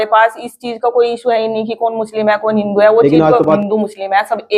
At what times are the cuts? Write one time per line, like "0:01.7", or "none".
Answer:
0:03.6